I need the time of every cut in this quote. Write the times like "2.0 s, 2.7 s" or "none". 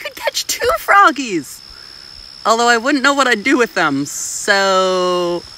none